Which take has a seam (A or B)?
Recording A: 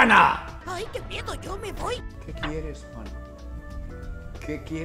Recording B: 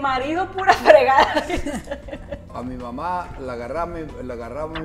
B